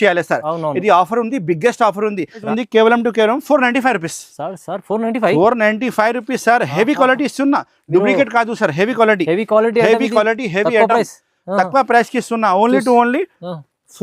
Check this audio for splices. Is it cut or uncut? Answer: cut